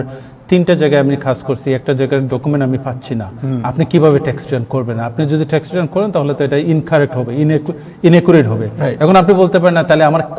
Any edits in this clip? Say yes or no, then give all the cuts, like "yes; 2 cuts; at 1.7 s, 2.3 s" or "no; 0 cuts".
no; 0 cuts